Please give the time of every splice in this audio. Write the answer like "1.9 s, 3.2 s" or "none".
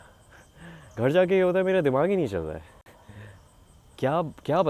none